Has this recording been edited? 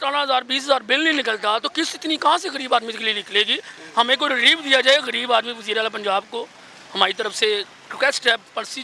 no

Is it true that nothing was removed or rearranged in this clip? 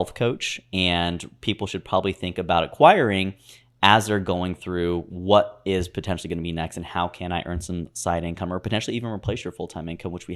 yes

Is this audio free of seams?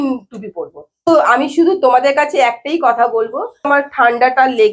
no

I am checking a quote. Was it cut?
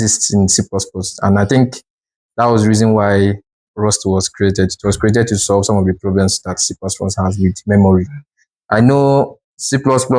no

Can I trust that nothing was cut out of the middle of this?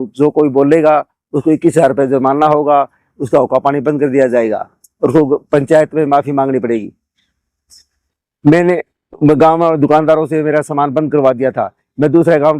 yes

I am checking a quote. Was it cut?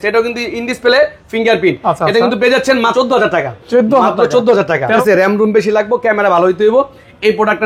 yes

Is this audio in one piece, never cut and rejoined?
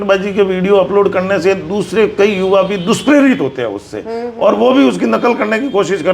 yes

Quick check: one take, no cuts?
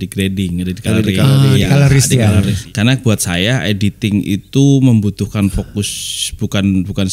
no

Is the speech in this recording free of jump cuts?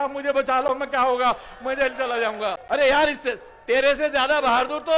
no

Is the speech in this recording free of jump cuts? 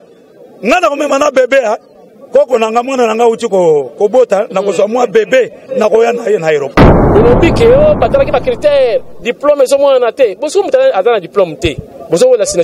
no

